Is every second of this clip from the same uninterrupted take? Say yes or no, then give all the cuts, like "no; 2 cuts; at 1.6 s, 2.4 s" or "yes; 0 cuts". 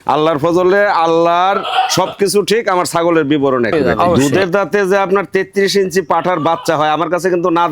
no; 1 cut; at 4.1 s